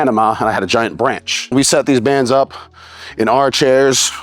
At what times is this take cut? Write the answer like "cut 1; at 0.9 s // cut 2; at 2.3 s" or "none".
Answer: cut 1; at 1.5 s